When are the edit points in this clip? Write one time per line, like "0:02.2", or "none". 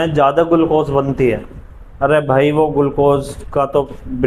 none